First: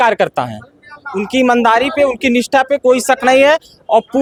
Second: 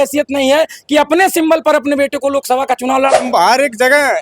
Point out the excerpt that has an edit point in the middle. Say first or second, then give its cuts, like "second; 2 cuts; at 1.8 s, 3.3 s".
second; 1 cut; at 3.2 s